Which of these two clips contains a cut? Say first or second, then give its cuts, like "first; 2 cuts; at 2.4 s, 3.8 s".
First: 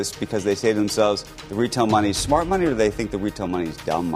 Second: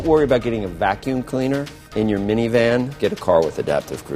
second; 2 cuts; at 1.8 s, 3.0 s